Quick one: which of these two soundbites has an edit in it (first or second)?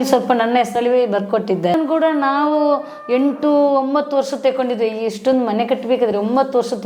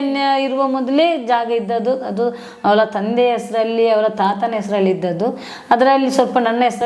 first